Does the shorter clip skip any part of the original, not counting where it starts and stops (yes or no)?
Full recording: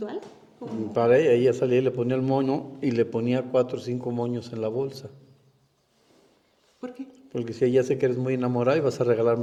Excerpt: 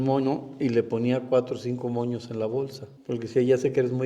yes